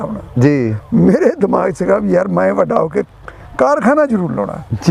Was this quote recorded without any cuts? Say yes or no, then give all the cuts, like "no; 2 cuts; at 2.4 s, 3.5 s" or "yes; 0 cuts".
yes; 0 cuts